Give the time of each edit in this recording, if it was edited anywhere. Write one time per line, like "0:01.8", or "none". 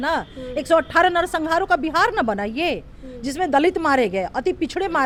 none